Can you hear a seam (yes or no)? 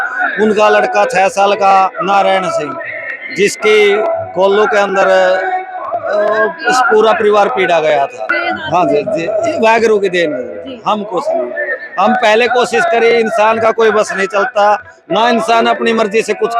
yes